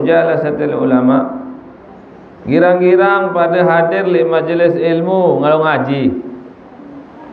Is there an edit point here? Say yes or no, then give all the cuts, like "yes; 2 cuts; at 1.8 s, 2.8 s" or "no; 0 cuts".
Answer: no; 0 cuts